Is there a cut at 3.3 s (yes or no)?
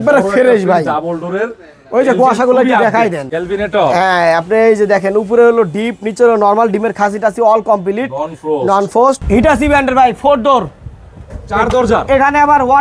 yes